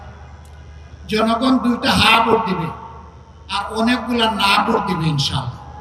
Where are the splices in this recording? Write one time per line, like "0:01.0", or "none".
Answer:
none